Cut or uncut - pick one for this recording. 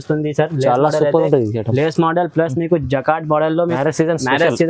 cut